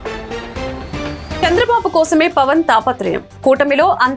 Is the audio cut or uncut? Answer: cut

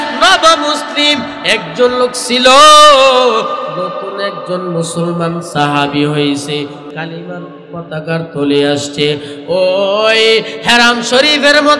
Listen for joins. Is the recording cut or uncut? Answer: cut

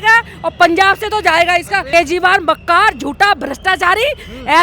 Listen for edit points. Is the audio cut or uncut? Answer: cut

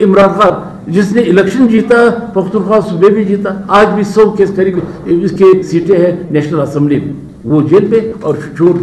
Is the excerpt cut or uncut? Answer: uncut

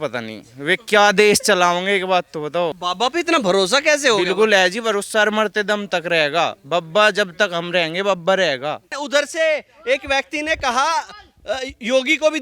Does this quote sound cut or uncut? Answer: cut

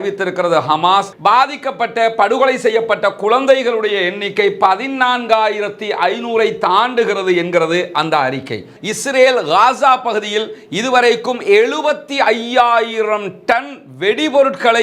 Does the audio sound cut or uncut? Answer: cut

